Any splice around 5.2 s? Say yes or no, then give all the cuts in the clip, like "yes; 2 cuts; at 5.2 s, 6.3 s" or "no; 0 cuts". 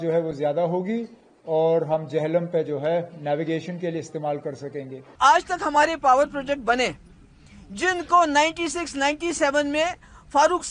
yes; 1 cut; at 5.2 s